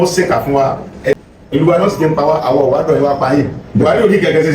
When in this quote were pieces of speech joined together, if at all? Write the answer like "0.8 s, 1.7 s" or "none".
1.2 s